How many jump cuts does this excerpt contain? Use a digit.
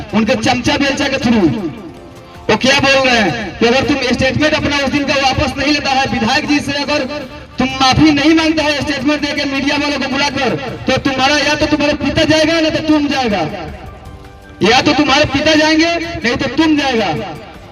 0